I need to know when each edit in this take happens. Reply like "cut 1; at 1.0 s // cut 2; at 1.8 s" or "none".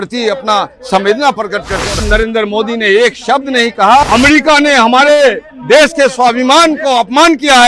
cut 1; at 2.0 s // cut 2; at 4.0 s